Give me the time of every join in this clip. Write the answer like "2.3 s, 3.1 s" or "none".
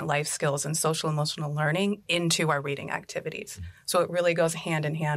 none